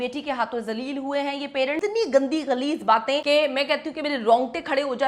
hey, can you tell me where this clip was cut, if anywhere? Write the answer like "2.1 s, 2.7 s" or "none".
1.8 s, 3.2 s